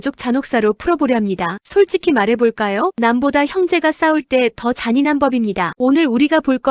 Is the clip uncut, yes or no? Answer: yes